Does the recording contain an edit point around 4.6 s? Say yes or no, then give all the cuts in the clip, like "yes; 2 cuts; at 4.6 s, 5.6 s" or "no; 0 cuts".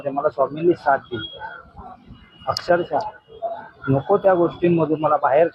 no; 0 cuts